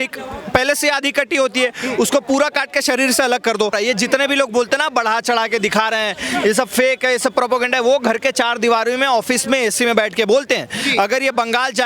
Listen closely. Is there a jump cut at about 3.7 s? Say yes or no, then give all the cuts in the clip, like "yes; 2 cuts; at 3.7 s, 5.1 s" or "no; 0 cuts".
yes; 1 cut; at 3.7 s